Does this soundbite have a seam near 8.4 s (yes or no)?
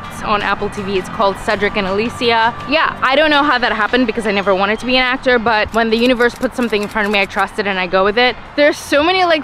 yes